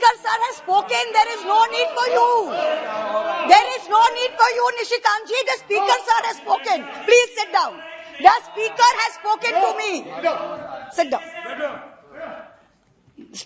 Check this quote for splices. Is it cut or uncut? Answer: uncut